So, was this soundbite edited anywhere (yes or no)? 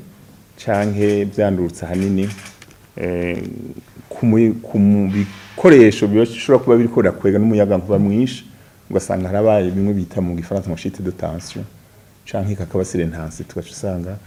no